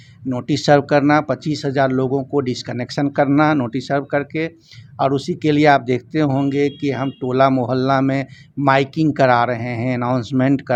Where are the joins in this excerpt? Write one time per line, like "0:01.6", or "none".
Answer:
none